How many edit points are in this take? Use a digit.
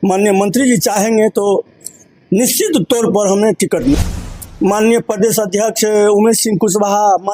1